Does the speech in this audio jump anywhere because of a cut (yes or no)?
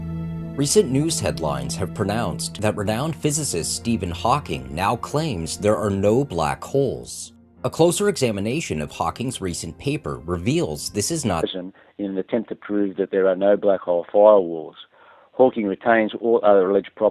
no